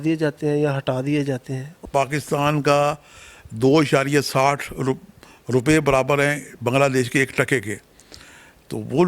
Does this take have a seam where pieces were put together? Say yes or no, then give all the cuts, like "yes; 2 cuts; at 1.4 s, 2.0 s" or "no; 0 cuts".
yes; 1 cut; at 1.8 s